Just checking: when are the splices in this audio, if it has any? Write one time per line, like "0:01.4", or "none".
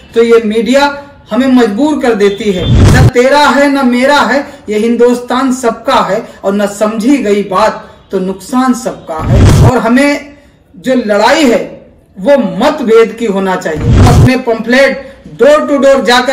0:02.8
0:09.5
0:14.1